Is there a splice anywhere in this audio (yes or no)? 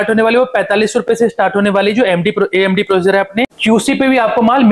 yes